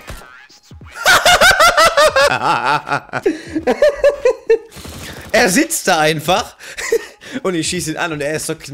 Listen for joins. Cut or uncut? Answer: uncut